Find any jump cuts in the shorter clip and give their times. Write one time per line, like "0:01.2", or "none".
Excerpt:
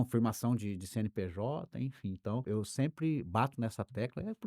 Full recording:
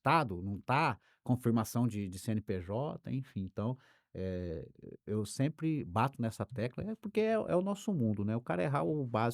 0:02.4

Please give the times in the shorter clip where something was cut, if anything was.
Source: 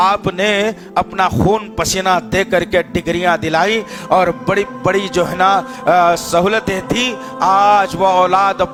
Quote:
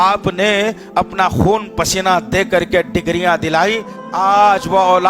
0:03.9

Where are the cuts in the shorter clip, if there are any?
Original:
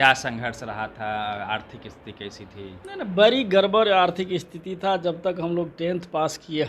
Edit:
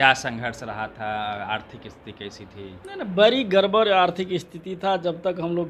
none

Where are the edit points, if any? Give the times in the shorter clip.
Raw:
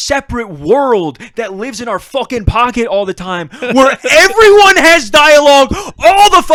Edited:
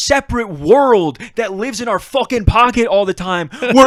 none

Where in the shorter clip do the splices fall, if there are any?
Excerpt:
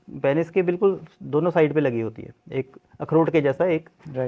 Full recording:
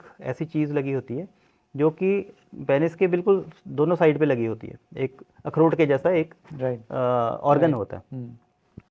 none

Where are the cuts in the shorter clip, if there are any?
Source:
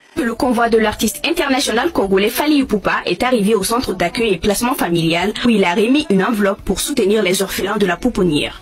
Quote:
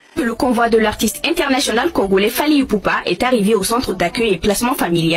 none

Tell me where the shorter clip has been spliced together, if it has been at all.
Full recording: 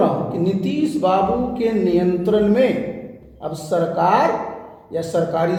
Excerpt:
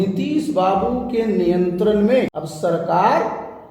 0:02.3

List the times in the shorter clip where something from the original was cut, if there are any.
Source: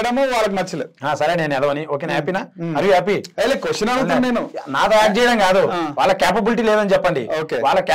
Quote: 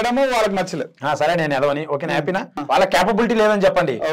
0:02.6

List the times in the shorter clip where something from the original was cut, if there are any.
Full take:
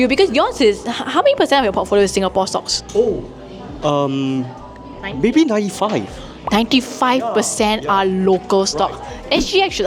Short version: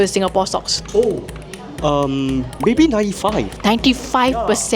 0:02.5
0:03.5

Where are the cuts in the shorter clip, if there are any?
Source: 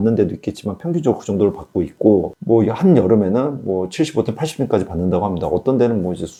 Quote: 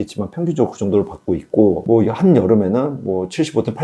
0:01.8

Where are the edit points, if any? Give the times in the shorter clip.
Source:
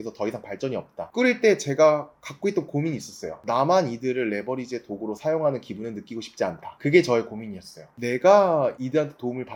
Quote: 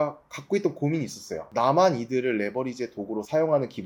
none

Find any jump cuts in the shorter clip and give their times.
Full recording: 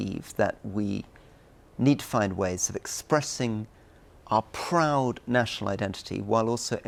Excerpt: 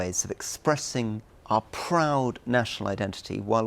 0:01.3

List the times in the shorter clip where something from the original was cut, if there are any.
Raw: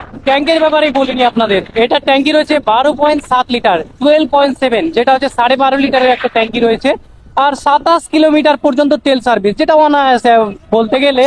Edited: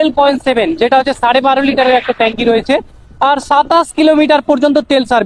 none

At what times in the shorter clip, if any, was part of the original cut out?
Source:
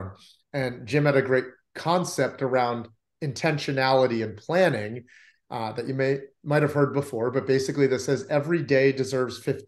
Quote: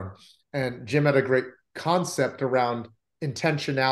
none

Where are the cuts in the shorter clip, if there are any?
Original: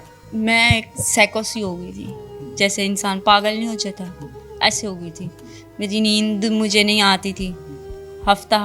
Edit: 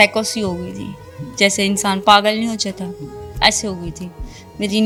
none

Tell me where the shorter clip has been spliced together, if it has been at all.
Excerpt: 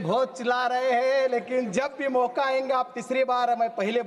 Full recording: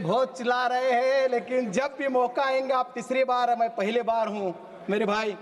none

